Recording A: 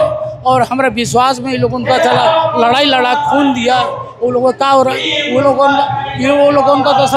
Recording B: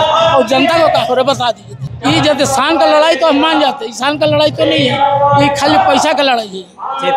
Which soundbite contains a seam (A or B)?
B